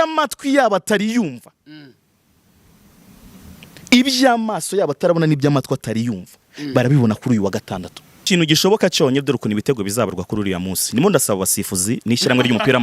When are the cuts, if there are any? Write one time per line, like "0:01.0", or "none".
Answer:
0:08.2

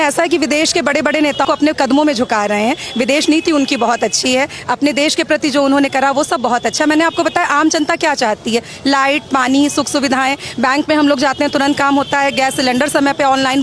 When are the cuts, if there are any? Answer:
0:01.4

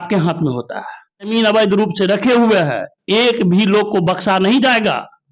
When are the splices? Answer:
0:01.3

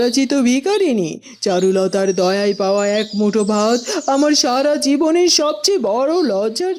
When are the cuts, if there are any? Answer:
none

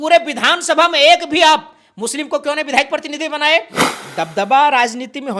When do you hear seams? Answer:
0:03.8

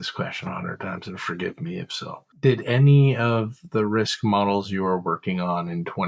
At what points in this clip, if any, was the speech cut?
0:02.3

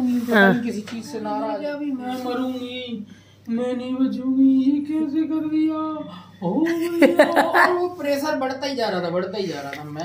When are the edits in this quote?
0:01.5

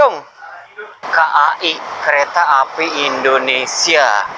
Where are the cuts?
0:01.0

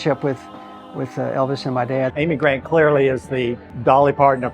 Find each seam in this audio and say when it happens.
0:02.1
0:03.6

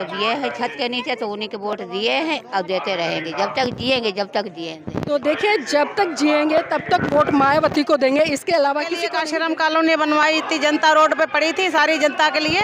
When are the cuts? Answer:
0:09.0

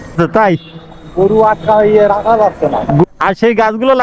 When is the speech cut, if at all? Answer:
0:03.0

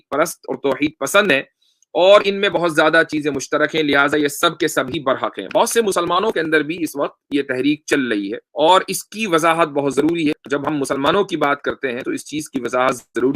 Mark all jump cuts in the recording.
0:08.4
0:10.4

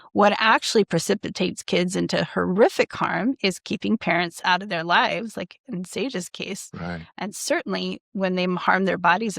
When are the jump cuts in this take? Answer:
none

